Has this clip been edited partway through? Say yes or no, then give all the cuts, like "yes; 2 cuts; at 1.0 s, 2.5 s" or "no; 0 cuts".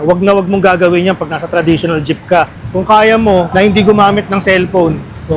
no; 0 cuts